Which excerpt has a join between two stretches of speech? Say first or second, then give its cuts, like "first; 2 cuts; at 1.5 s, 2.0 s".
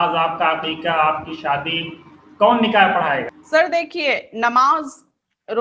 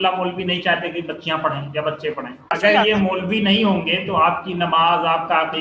second; 1 cut; at 2.6 s